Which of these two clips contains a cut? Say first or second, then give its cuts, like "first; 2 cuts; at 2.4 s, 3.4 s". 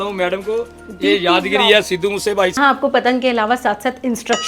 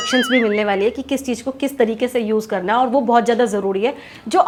first; 1 cut; at 2.6 s